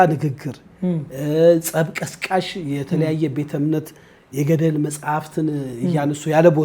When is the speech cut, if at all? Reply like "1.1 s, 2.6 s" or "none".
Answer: none